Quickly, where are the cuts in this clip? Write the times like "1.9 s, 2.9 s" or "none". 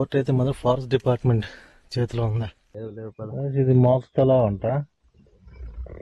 2.9 s

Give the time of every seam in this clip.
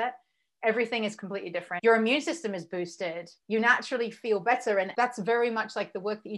1.7 s, 3.3 s, 4.9 s

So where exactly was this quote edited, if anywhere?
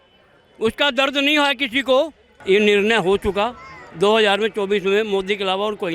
2.3 s

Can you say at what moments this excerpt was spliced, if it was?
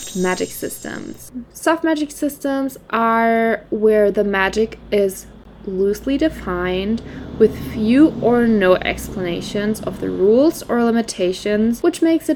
none

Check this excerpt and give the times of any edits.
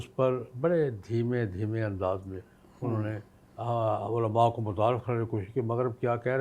none

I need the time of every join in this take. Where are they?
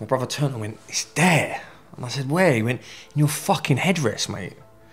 none

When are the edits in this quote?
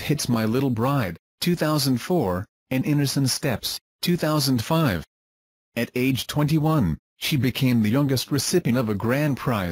8.3 s

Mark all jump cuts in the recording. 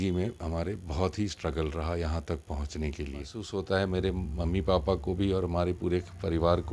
3.4 s

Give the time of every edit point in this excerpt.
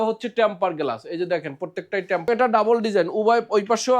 2.3 s

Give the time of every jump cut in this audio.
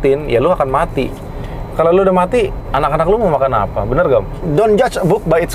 4.4 s

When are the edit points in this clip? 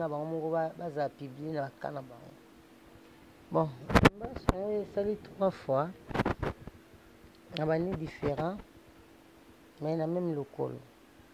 3.4 s

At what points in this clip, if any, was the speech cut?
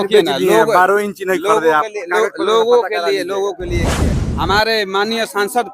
3.9 s

